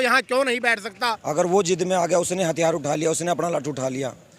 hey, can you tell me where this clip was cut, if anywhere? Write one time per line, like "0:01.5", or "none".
0:00.9